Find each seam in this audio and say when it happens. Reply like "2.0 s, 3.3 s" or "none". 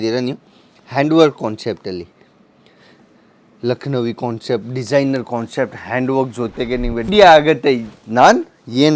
7.1 s